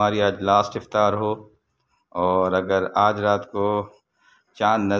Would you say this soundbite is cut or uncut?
uncut